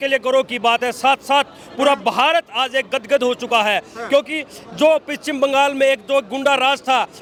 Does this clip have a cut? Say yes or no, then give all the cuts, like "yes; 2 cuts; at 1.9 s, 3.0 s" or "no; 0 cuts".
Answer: no; 0 cuts